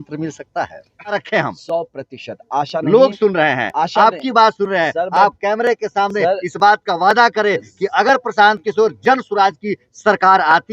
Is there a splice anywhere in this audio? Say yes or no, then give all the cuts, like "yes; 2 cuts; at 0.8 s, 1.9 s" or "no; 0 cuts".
yes; 1 cut; at 1.2 s